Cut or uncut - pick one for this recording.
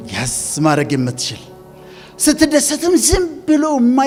uncut